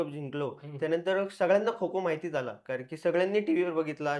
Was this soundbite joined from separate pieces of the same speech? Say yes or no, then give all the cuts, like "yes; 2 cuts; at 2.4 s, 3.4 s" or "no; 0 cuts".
no; 0 cuts